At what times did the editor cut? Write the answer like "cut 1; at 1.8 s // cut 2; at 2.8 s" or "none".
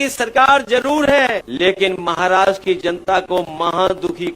cut 1; at 1.5 s

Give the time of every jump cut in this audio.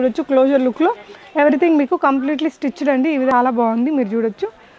cut 1; at 3.3 s

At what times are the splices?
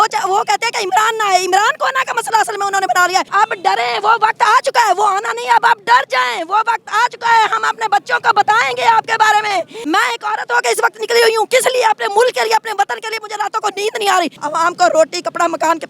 cut 1; at 3.3 s // cut 2; at 9.7 s // cut 3; at 14.4 s

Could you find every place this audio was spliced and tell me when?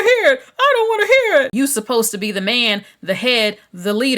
cut 1; at 1.5 s

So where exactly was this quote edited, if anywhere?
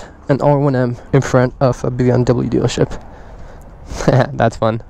none

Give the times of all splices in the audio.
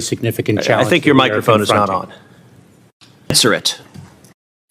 cut 1; at 3.4 s

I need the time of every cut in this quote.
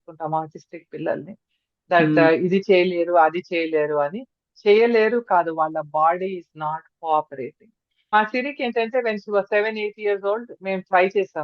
cut 1; at 8.1 s

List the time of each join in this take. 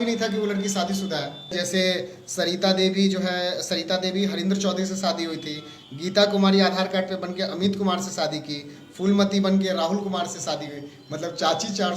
cut 1; at 1.5 s

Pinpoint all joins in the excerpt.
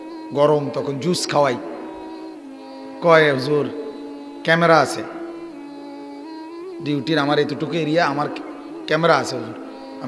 cut 1; at 5.0 s // cut 2; at 6.8 s

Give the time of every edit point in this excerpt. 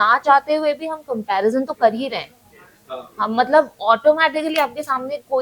none

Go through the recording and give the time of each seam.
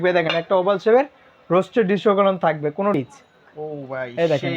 cut 1; at 2.9 s

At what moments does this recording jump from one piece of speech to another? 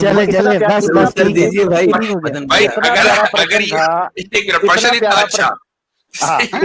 none

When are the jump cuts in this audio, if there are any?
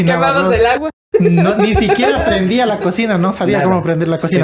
none

